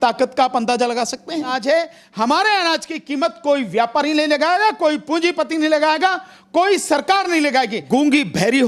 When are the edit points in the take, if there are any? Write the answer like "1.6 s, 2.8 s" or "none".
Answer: 1.5 s, 7.8 s